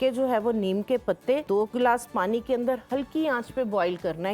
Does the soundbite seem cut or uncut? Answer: cut